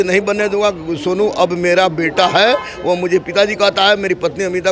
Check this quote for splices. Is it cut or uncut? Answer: uncut